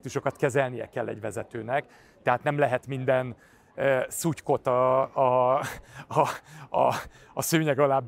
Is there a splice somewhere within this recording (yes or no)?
no